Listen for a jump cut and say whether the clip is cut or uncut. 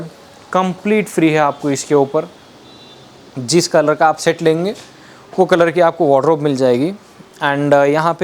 uncut